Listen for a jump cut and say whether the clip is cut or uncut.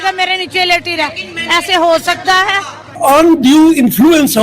cut